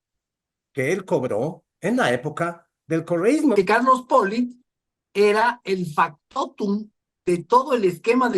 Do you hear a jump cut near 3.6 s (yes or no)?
yes